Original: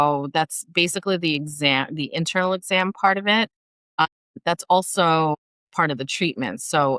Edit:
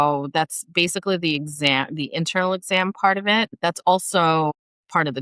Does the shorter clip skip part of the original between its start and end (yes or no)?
yes